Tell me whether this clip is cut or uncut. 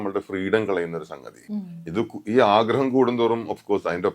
cut